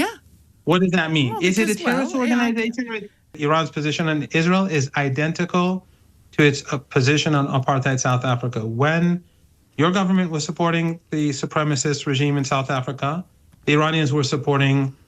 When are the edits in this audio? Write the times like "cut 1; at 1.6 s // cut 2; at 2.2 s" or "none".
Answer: cut 1; at 3.3 s